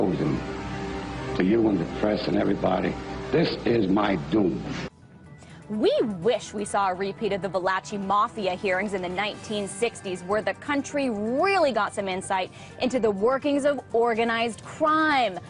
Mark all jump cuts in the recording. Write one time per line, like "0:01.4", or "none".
0:04.6